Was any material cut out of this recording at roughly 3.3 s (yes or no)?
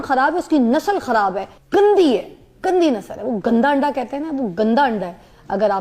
no